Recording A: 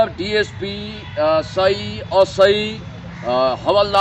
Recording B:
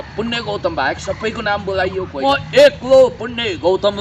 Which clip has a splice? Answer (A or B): B